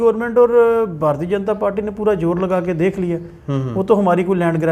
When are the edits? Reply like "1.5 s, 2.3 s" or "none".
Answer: none